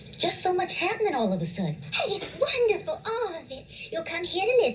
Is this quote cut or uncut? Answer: uncut